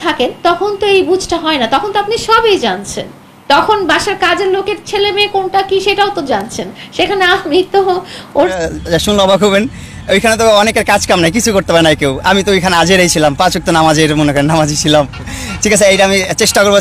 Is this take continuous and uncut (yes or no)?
no